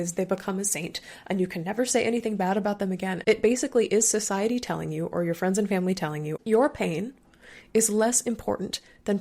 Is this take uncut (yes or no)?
no